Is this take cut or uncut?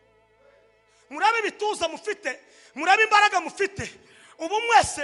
uncut